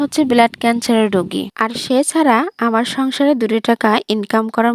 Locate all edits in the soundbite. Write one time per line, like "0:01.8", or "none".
none